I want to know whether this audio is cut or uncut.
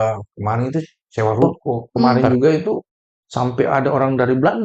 cut